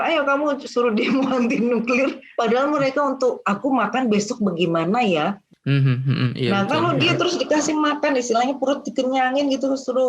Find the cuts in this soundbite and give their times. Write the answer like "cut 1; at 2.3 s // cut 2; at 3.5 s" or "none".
cut 1; at 2.2 s // cut 2; at 5.4 s